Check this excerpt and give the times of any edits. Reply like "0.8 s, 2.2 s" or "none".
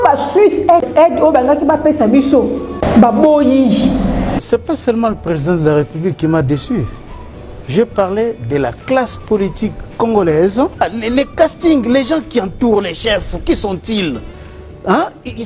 2.8 s, 4.4 s, 10.8 s